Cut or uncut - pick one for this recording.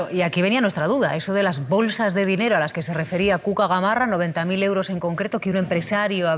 uncut